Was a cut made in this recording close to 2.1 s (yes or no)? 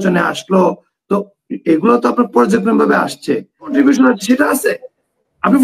no